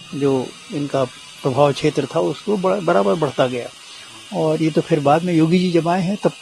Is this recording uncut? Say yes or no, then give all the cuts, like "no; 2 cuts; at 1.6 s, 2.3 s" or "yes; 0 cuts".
yes; 0 cuts